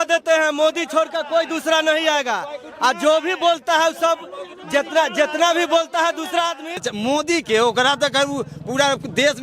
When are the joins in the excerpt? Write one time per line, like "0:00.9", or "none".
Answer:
0:06.9

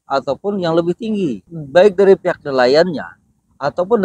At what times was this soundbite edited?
0:01.5

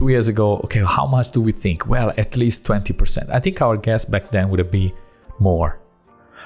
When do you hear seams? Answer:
none

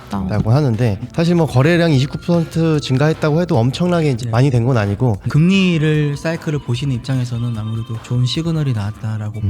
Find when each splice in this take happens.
0:05.2

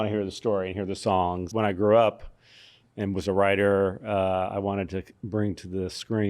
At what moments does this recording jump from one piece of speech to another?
0:01.4

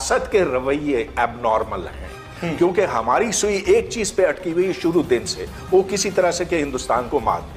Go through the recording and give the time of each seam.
none

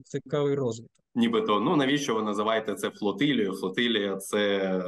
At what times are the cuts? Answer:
0:00.9

